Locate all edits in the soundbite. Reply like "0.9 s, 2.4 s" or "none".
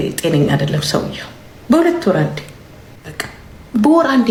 none